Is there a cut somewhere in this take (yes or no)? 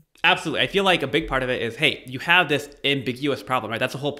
no